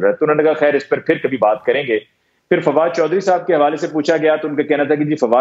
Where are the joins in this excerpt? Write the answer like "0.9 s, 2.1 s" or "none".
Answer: none